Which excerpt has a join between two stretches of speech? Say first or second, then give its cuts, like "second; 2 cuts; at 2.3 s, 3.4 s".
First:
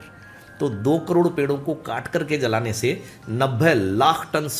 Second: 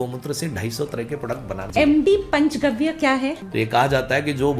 second; 2 cuts; at 1.6 s, 3.4 s